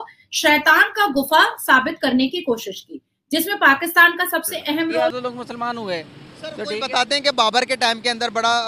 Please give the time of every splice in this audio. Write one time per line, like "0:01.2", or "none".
0:05.1

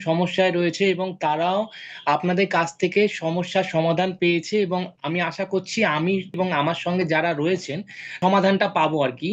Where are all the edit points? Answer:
0:06.4
0:08.1

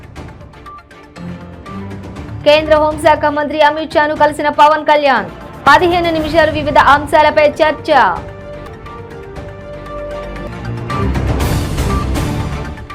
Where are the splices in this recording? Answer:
none

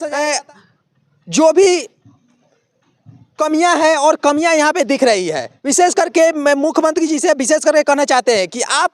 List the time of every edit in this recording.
none

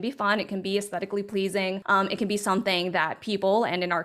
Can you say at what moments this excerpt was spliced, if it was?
0:01.8

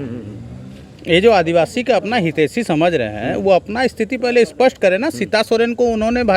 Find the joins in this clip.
none

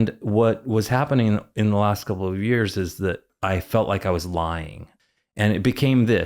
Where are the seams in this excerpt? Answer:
0:03.3
0:04.9

